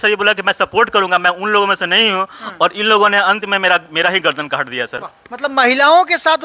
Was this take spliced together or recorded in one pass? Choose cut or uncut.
uncut